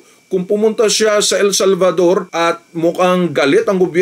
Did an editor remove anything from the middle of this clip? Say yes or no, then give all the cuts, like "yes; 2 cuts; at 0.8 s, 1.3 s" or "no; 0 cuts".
yes; 1 cut; at 2.3 s